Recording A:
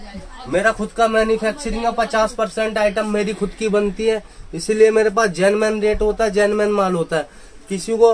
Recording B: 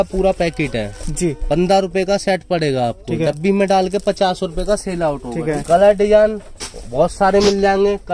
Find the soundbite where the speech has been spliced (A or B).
B